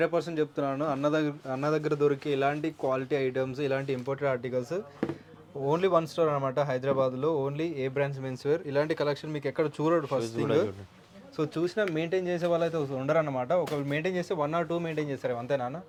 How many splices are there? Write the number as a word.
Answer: zero